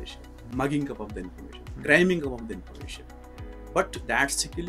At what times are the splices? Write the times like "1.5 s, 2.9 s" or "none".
none

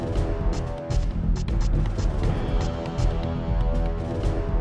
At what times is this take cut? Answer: 1.0 s

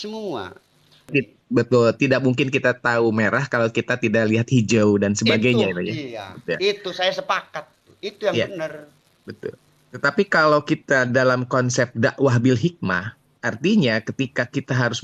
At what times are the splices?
1.1 s

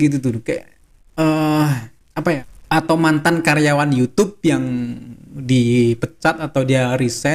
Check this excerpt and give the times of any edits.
2.5 s

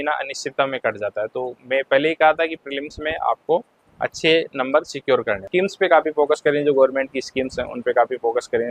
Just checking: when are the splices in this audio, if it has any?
5.4 s

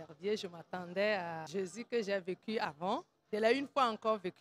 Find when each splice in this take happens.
1.4 s, 3.1 s

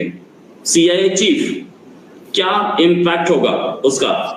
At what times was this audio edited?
none

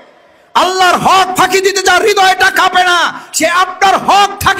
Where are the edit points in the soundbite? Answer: none

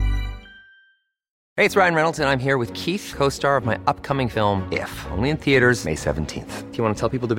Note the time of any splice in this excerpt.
1.4 s

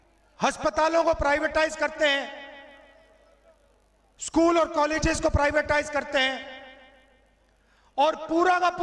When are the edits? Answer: none

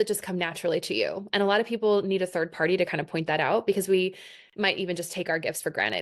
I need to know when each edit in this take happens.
none

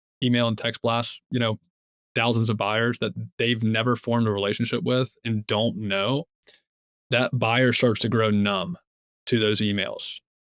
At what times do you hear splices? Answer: none

